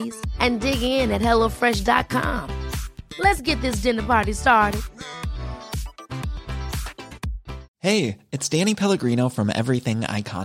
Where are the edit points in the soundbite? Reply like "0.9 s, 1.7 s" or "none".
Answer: 7.7 s